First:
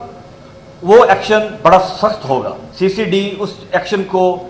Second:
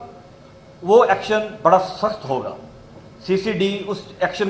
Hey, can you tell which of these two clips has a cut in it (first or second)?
first